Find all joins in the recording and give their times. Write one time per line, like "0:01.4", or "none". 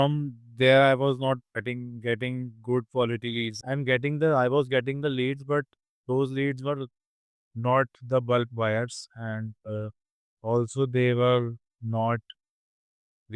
0:03.5